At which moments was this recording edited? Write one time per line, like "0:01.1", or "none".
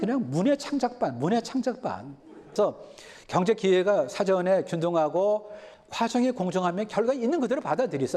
0:02.5